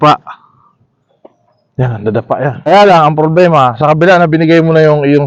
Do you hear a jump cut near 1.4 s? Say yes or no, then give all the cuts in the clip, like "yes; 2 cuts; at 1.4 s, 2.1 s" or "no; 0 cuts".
no; 1 cut; at 2.7 s